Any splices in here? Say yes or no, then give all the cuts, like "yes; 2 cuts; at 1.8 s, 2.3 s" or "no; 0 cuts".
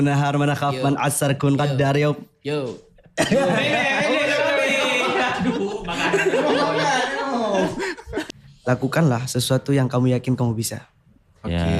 yes; 1 cut; at 8.1 s